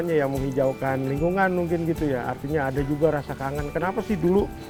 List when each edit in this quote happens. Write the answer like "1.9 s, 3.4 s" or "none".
none